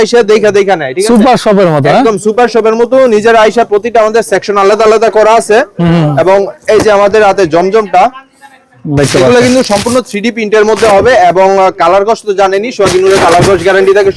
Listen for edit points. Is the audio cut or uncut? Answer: uncut